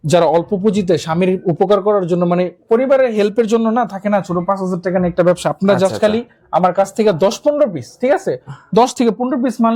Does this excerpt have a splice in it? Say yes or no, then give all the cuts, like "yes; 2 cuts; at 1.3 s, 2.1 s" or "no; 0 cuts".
no; 0 cuts